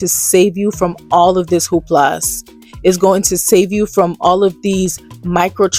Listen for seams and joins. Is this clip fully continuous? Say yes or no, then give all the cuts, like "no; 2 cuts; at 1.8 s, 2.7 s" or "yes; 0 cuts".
yes; 0 cuts